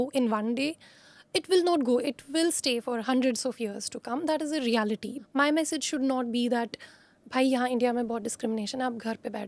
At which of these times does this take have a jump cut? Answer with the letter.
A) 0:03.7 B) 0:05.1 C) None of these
B